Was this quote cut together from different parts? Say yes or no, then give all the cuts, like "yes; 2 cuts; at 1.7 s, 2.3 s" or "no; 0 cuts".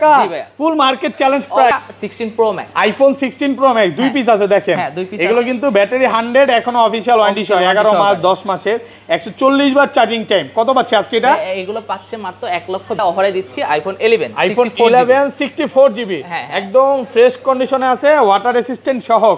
yes; 2 cuts; at 1.7 s, 12.9 s